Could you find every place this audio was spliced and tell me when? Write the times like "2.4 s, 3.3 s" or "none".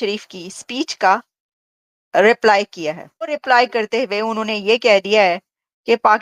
3.4 s